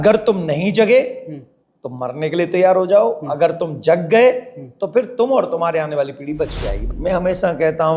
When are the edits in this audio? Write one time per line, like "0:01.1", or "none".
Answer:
0:06.8